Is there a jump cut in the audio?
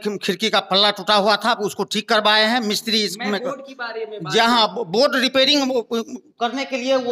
no; 0 cuts

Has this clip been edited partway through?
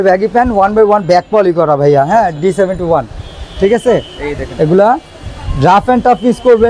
no; 0 cuts

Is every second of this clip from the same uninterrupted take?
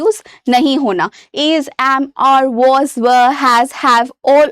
yes; 0 cuts

